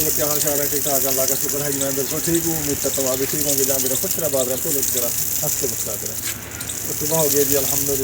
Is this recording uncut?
yes; 0 cuts

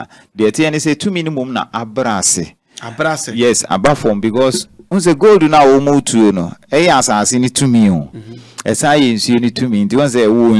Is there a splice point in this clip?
no; 0 cuts

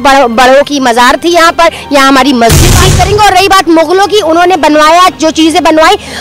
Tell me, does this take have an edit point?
yes; 1 cut; at 2.9 s

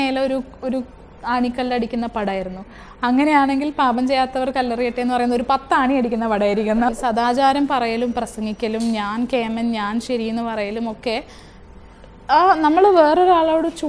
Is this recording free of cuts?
no; 1 cut; at 6.9 s

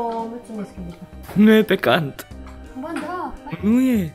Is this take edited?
yes; 1 cut; at 1.2 s

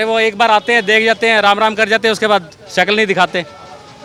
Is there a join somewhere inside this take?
no; 0 cuts

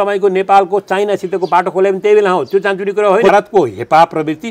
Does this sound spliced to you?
yes; 1 cut; at 3.3 s

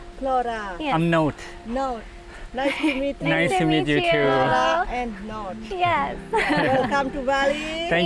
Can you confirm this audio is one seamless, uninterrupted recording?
yes; 0 cuts

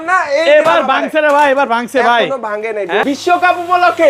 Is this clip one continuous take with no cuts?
no; 1 cut; at 3.0 s

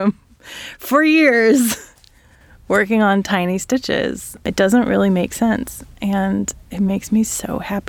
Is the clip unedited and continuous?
yes; 0 cuts

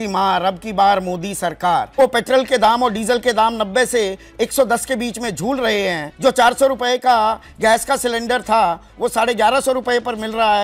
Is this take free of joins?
no; 2 cuts; at 1.9 s, 6.1 s

